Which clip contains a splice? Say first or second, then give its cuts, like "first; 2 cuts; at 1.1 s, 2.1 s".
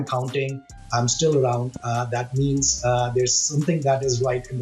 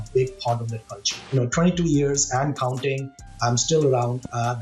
second; 1 cut; at 1.3 s